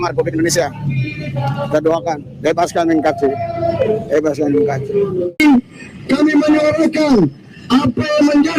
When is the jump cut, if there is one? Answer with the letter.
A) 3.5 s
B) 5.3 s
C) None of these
B